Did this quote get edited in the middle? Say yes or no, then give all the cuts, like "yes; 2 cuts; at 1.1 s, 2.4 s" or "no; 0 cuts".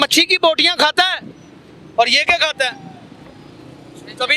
no; 0 cuts